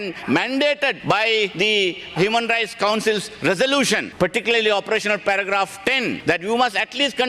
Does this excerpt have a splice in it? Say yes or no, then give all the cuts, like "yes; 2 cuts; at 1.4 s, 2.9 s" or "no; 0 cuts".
yes; 3 cuts; at 1.3 s, 4.1 s, 6.2 s